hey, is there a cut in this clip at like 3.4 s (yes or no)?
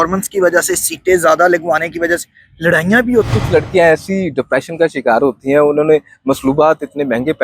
yes